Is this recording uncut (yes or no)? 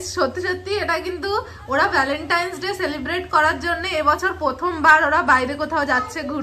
yes